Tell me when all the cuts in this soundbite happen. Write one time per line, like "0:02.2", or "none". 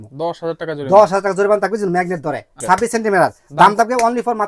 0:02.6